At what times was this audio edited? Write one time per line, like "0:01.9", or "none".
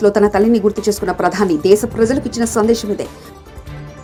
none